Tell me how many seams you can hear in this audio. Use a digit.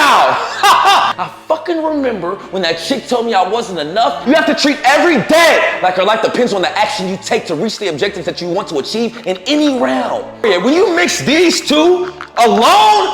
3